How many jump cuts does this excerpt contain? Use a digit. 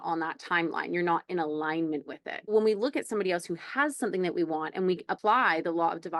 2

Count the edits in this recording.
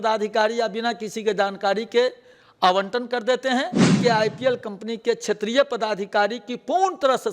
1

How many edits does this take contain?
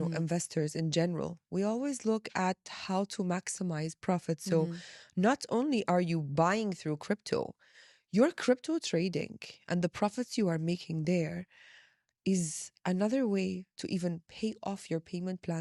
0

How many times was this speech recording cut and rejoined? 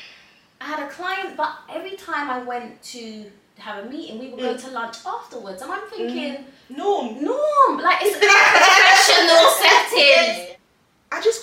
1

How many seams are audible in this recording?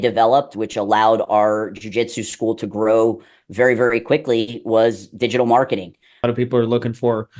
1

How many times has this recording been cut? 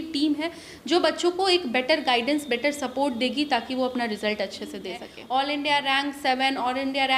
1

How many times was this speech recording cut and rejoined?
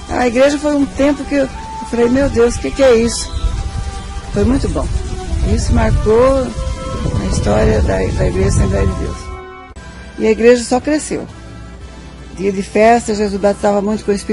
1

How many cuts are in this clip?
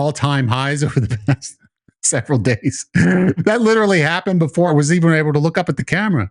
2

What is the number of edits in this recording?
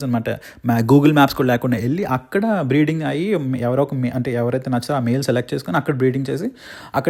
0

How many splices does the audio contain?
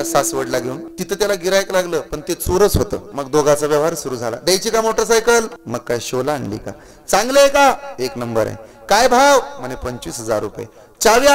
3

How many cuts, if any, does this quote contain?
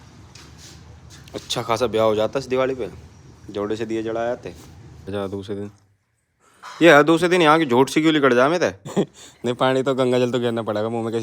2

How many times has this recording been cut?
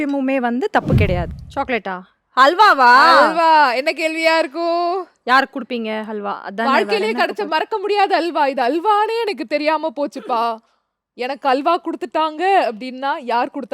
1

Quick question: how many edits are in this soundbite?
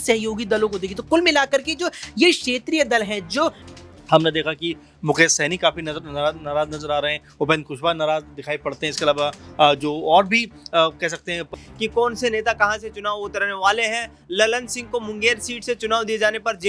2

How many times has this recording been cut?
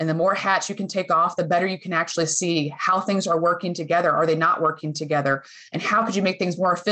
0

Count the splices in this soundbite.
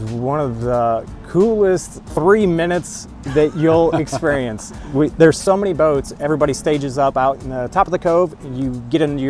1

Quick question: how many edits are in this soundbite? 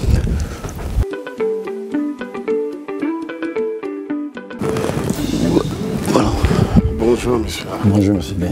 1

